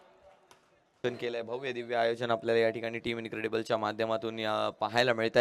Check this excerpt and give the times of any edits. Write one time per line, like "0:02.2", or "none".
0:01.0

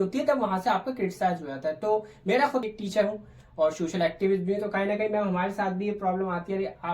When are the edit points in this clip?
0:02.7

